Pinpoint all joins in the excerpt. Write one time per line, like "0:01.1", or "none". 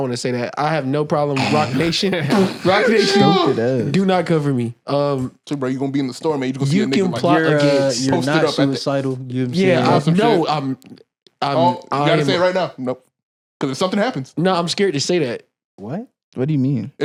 none